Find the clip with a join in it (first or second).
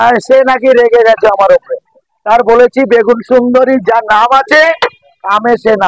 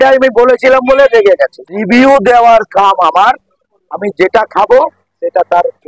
second